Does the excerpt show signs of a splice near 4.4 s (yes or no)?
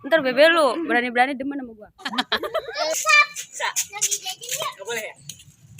no